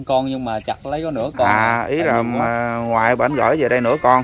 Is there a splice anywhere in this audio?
no; 0 cuts

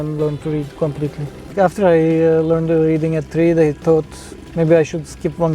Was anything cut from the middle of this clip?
yes; 1 cut; at 1.5 s

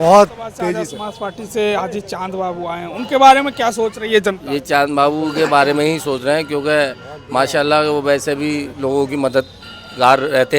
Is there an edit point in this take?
yes; 1 cut; at 1.0 s

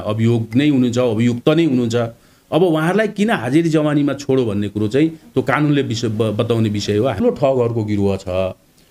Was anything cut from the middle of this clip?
yes; 1 cut; at 7.2 s

